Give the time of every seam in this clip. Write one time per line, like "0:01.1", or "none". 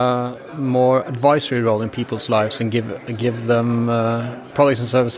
none